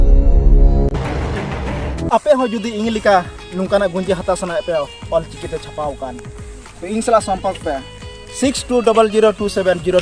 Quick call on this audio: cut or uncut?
uncut